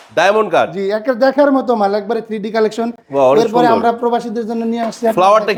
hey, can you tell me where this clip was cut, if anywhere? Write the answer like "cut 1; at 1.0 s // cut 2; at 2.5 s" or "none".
none